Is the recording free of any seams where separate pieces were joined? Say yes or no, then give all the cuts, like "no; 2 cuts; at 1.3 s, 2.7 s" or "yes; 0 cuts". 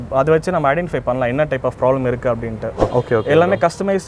no; 1 cut; at 2.9 s